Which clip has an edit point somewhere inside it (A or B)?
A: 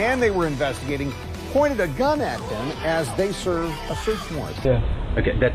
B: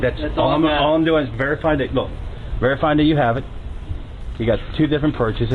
A